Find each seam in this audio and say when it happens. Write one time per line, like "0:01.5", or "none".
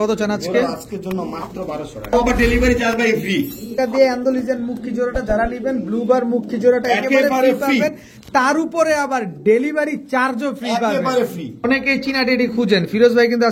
0:02.1
0:03.8
0:11.6